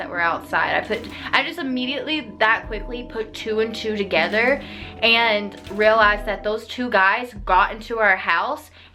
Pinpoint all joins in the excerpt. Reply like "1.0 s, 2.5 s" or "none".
none